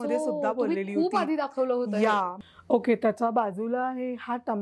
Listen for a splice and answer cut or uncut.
cut